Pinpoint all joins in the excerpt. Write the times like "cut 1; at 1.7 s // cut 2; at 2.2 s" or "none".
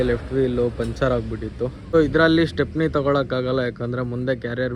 cut 1; at 1.9 s

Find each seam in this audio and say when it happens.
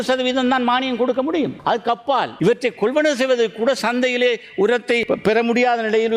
cut 1; at 1.9 s // cut 2; at 5.0 s

